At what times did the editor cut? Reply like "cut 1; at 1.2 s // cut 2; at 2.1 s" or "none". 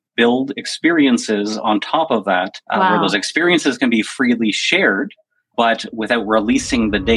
none

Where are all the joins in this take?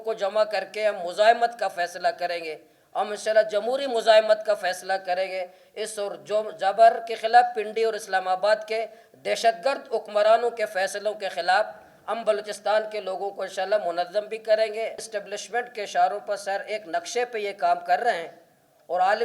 cut 1; at 15.1 s

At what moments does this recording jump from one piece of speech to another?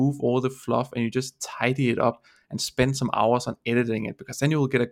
none

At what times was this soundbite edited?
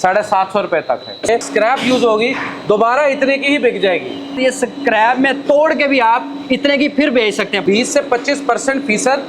cut 1; at 1.3 s // cut 2; at 4.4 s // cut 3; at 7.6 s

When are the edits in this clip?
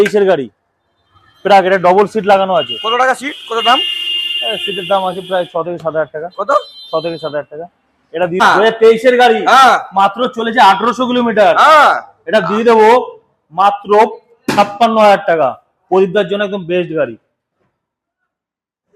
cut 1; at 8.4 s

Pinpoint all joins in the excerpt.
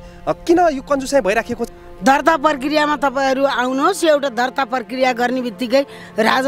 cut 1; at 1.6 s

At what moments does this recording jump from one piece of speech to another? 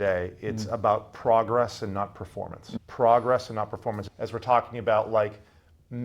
cut 1; at 2.7 s // cut 2; at 4.0 s

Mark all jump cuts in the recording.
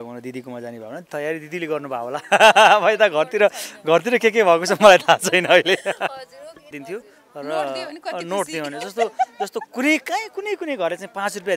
cut 1; at 6.8 s

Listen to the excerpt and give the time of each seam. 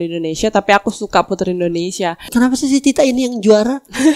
cut 1; at 2.2 s

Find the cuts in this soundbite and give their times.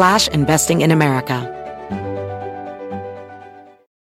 cut 1; at 1.4 s

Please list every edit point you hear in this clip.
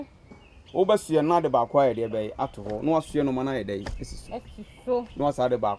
none

